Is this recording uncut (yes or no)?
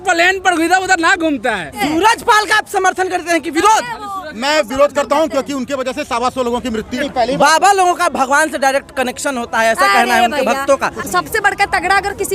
no